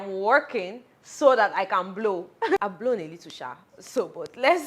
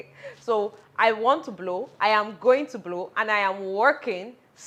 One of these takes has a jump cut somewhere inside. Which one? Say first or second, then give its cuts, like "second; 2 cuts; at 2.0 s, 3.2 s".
first; 1 cut; at 2.4 s